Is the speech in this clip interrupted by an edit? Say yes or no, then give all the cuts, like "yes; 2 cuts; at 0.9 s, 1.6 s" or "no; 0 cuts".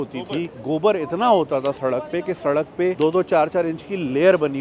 yes; 1 cut; at 3.0 s